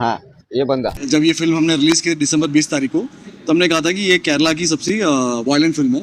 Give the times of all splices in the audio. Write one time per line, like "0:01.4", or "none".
0:00.9